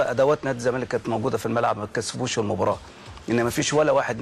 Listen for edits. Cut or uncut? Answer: uncut